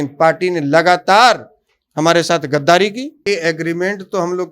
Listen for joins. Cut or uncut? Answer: cut